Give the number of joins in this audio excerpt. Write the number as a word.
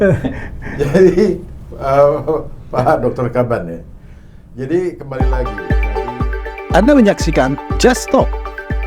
one